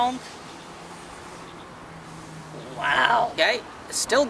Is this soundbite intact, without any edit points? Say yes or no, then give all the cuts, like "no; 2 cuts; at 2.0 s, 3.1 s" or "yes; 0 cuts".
no; 1 cut; at 3.3 s